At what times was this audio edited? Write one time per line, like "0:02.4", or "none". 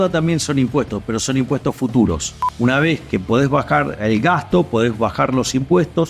0:02.3
0:04.0